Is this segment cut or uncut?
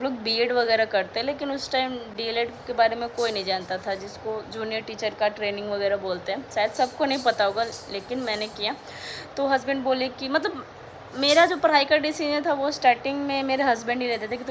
uncut